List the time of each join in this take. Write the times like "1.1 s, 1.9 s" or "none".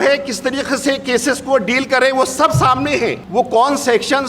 3.2 s